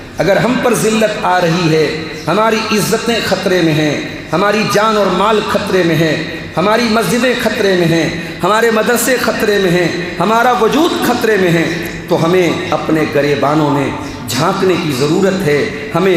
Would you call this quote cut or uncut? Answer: uncut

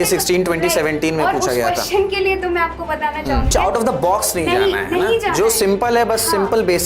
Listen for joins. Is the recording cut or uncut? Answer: cut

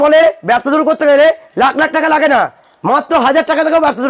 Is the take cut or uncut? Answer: uncut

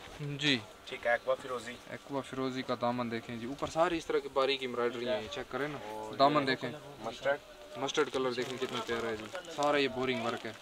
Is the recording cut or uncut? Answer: uncut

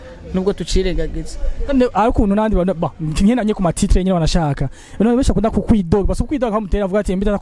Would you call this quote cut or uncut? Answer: uncut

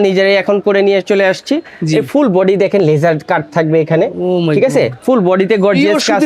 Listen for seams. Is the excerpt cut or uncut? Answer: uncut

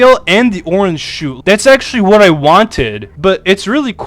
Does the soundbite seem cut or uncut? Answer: cut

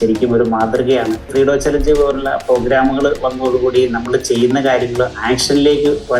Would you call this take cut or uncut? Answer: cut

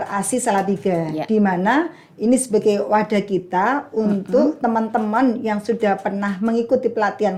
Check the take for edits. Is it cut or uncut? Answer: uncut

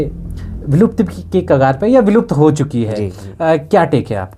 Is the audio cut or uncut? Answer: uncut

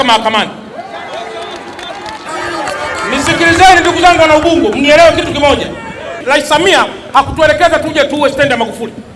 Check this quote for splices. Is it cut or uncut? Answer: cut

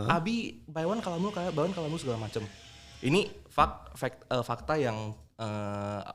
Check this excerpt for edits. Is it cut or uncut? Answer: uncut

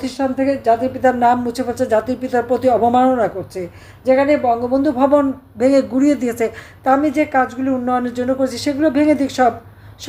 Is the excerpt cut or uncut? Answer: uncut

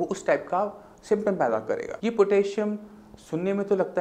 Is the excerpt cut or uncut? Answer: cut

